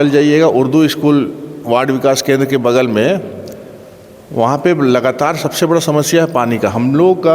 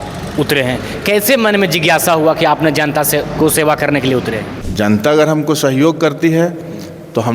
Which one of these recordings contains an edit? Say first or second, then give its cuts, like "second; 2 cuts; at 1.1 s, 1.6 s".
second; 1 cut; at 4.6 s